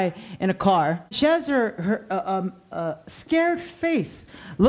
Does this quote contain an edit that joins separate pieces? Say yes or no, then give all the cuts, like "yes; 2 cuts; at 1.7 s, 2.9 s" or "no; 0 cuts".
yes; 1 cut; at 1.2 s